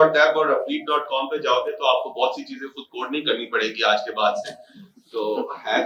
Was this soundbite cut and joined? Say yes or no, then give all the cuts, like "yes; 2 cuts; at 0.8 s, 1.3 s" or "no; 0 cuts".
no; 0 cuts